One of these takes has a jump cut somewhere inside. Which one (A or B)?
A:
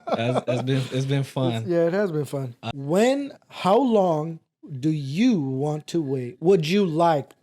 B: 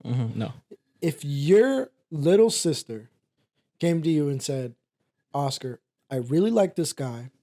A